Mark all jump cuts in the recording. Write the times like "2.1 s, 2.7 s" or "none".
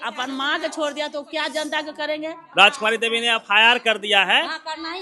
2.4 s